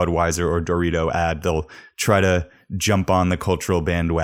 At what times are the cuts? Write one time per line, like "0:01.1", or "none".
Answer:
none